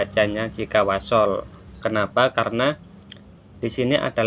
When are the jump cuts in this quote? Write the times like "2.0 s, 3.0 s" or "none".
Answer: none